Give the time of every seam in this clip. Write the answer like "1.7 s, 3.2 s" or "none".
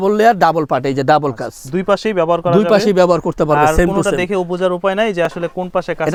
none